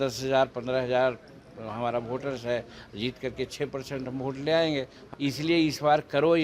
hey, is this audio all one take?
no; 1 cut; at 5.0 s

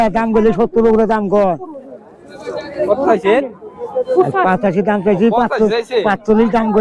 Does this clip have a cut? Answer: no; 0 cuts

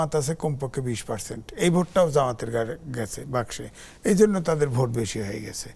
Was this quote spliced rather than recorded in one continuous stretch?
no; 0 cuts

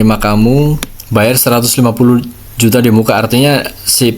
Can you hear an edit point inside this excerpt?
yes; 1 cut; at 0.9 s

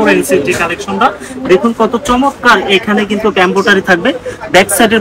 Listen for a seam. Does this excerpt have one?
no; 0 cuts

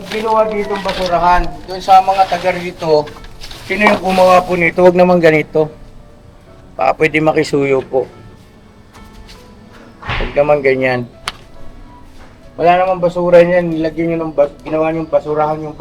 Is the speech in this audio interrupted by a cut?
no; 0 cuts

